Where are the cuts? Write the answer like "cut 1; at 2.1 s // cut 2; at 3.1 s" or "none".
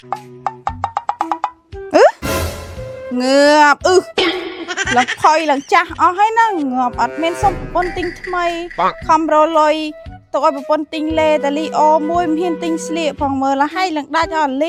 none